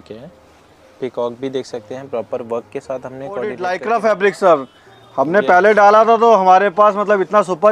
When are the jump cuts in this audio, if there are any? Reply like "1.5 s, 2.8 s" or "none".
3.6 s

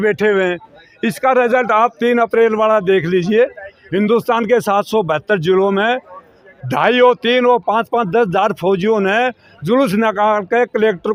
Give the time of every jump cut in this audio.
none

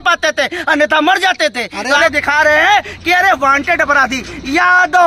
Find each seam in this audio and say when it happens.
2.0 s

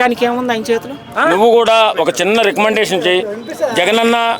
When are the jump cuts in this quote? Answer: 1.1 s

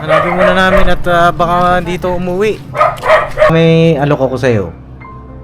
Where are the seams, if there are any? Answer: 3.5 s

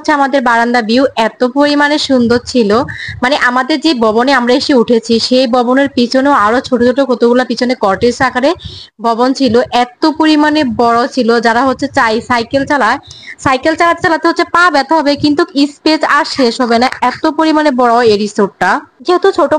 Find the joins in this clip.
none

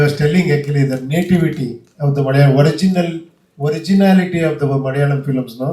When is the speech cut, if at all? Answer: none

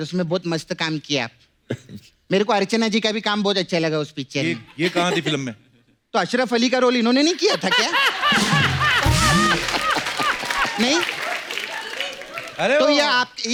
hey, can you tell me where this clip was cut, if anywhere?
none

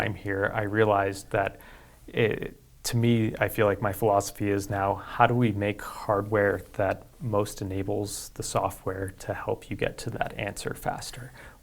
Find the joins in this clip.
none

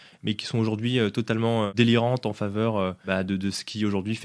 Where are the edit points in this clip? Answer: 1.7 s, 3.0 s

